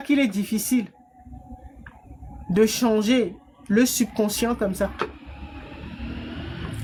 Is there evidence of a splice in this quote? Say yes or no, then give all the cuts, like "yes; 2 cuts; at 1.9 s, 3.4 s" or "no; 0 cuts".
no; 0 cuts